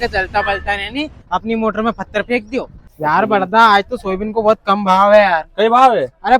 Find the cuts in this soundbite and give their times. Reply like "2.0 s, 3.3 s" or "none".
2.8 s